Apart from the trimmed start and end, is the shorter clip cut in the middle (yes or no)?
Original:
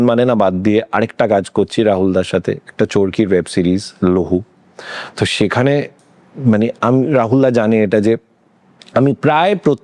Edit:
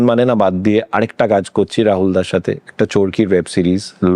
no